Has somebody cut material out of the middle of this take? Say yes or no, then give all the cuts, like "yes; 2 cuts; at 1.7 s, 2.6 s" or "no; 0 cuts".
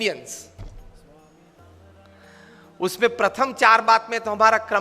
yes; 1 cut; at 2.1 s